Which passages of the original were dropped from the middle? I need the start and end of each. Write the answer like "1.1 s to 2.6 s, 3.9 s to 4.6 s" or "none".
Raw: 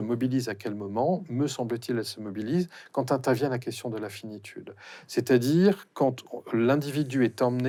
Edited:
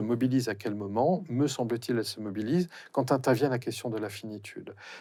none